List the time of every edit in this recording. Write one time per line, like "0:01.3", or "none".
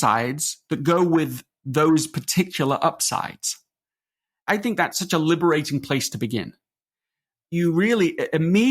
0:04.4
0:07.5